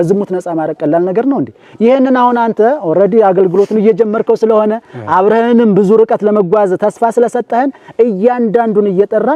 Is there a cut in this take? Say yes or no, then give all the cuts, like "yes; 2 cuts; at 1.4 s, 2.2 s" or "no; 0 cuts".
no; 0 cuts